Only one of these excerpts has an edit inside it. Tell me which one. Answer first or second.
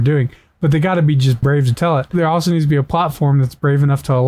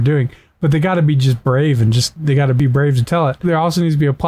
first